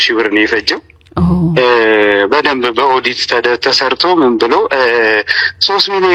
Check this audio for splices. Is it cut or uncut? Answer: uncut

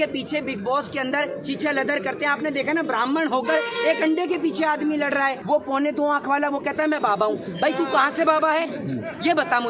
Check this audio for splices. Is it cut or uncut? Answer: cut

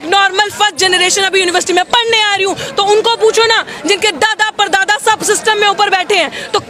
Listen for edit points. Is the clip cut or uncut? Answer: uncut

